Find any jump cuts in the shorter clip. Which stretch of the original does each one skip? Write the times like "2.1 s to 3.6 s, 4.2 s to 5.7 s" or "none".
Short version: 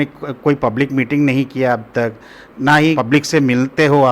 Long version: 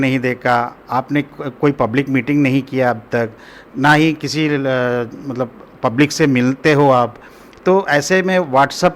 4.1 s to 5.8 s